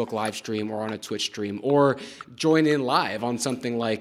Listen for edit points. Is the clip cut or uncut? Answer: uncut